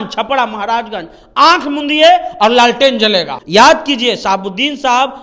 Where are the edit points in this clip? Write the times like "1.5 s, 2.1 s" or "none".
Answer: 3.4 s